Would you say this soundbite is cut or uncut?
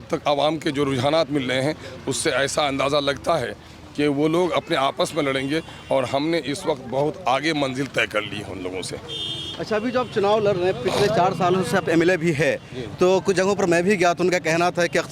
uncut